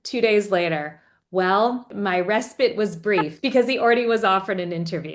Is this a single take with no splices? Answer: no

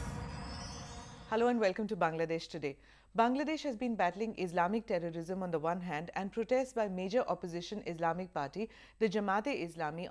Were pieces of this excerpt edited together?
yes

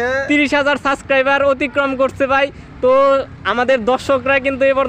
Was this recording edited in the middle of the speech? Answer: no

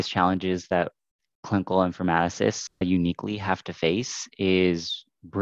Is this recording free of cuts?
yes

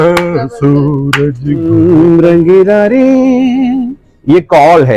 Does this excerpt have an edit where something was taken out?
yes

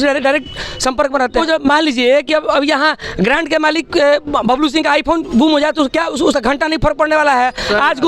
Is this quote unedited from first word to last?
no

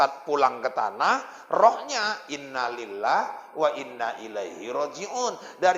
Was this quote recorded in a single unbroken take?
yes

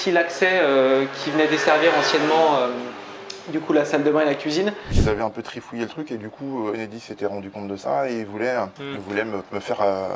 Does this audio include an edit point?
yes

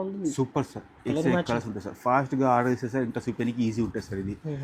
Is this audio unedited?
yes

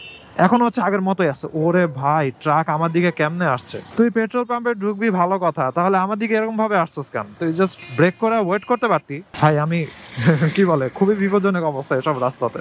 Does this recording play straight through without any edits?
yes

